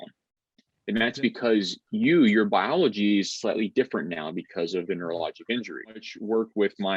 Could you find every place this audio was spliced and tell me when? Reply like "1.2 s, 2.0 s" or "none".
6.0 s